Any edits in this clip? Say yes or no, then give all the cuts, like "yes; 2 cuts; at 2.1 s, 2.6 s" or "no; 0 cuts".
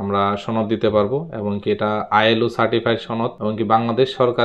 yes; 1 cut; at 3.4 s